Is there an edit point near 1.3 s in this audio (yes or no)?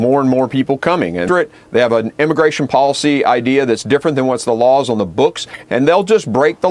yes